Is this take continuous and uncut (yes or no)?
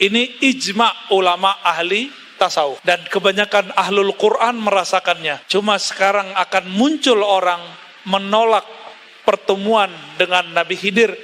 no